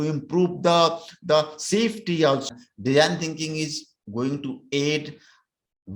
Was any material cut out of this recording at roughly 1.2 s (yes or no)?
no